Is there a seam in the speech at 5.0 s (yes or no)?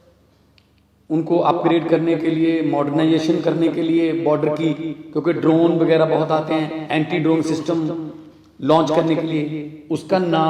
no